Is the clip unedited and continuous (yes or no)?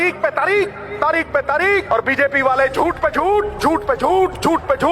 no